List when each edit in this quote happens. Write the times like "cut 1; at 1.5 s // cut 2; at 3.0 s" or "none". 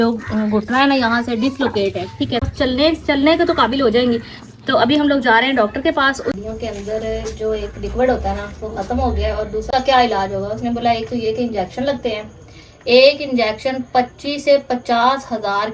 cut 1; at 2.5 s // cut 2; at 6.3 s // cut 3; at 9.6 s